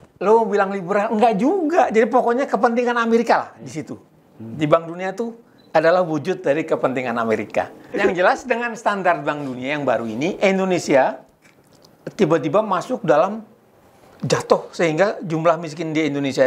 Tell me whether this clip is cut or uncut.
cut